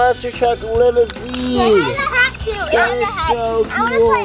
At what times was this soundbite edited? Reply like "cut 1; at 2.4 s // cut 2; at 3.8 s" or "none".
none